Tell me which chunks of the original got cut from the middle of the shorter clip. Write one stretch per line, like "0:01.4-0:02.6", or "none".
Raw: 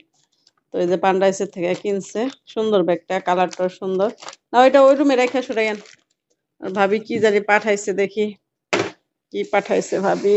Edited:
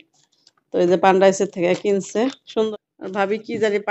0:02.7-0:06.3